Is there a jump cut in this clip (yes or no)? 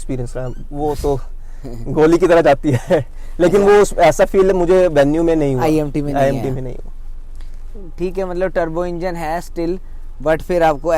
no